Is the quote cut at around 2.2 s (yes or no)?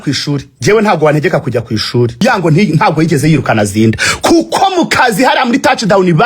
yes